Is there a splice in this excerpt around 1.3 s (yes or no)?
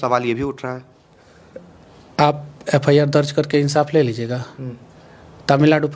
no